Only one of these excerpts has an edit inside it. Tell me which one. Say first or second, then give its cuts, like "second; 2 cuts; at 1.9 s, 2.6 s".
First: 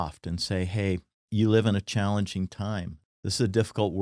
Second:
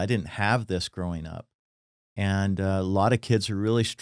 first; 2 cuts; at 1.1 s, 3.0 s